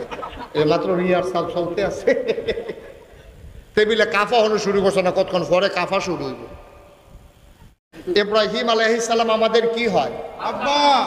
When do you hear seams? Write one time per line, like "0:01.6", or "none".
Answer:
0:07.7

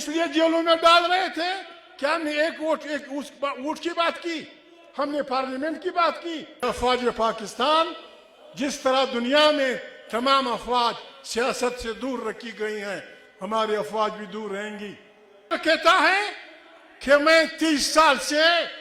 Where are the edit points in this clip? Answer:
0:06.6
0:15.5

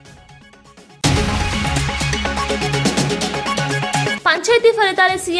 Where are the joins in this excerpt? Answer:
0:00.9
0:04.1

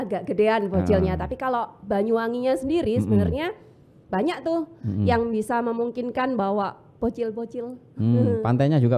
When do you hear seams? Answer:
none

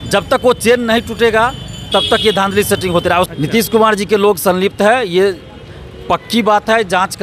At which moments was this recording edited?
0:03.3

